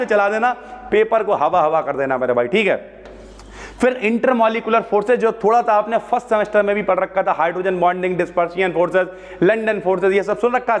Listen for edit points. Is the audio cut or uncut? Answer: uncut